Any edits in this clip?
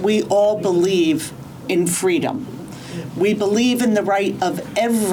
no; 0 cuts

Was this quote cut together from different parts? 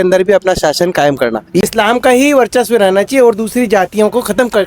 yes; 1 cut; at 1.6 s

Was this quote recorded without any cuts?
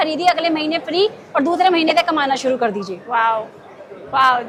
yes; 0 cuts

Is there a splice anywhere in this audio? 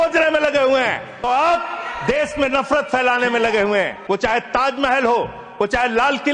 yes; 2 cuts; at 1.2 s, 4.0 s

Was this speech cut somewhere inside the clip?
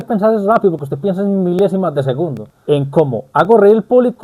yes; 1 cut; at 2.5 s

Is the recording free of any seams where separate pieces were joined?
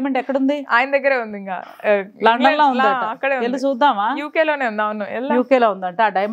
yes; 0 cuts

